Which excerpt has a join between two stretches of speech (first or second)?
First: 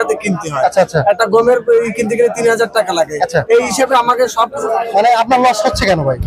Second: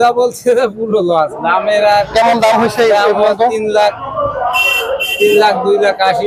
first